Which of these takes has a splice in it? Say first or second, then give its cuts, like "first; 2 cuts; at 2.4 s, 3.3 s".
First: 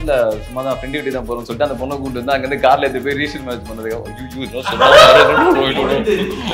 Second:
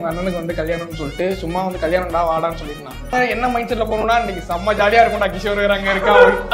second; 1 cut; at 3.1 s